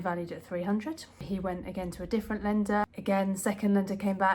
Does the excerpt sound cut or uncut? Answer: cut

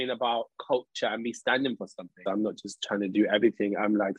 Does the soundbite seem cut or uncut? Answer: cut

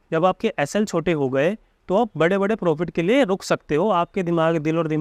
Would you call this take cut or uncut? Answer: uncut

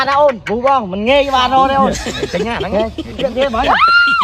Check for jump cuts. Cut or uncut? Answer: uncut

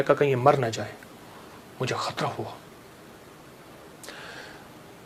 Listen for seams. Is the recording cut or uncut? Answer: uncut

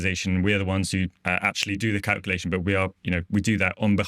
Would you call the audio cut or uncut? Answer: cut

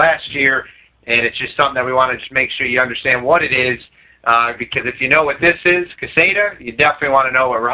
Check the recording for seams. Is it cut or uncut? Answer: uncut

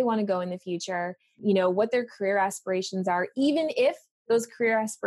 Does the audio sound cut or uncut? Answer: cut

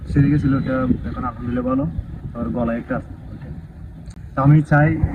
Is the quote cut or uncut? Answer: uncut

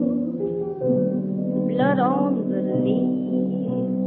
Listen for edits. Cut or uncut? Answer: cut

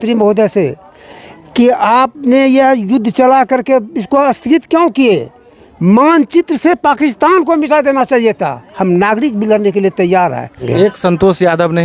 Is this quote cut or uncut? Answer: cut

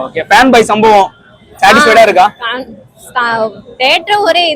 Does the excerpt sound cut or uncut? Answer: uncut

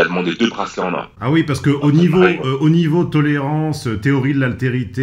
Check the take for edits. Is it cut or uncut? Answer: cut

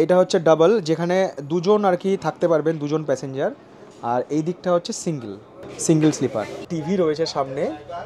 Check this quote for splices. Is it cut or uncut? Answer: uncut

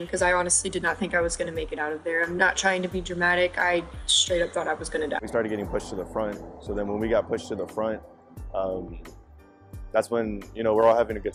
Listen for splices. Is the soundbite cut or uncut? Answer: uncut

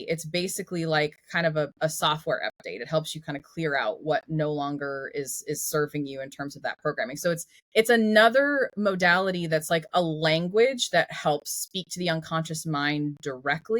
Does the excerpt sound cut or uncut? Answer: cut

